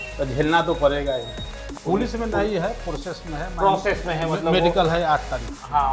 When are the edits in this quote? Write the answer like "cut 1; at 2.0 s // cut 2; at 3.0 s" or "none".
cut 1; at 1.7 s